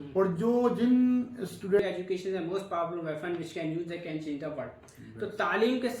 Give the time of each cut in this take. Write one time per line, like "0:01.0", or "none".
0:01.8